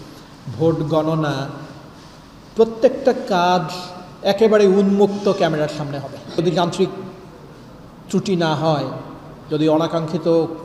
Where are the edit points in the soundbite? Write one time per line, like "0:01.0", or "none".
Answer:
0:06.4